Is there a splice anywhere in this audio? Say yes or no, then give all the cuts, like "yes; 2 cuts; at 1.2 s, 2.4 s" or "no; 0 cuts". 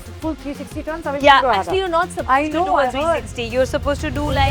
no; 0 cuts